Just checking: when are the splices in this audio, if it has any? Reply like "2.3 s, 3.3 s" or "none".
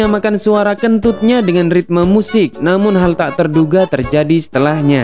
none